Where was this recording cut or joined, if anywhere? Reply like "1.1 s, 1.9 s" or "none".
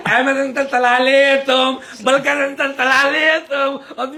none